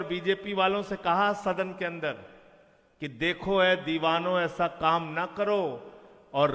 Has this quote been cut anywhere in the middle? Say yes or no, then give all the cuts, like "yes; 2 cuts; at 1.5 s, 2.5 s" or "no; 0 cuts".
no; 0 cuts